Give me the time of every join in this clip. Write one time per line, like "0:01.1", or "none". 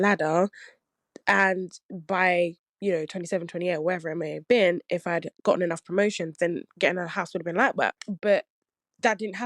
0:08.0